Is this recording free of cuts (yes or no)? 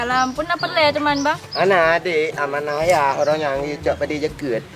yes